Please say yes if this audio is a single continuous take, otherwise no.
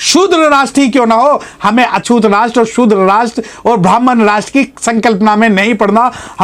yes